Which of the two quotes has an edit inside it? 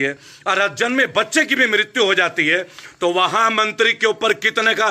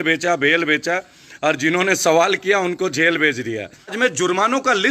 second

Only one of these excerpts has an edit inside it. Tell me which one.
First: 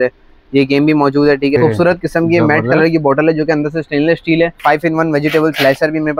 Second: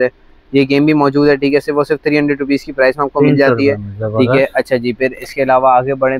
first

